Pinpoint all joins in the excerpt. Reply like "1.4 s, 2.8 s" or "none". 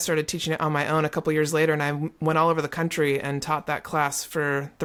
none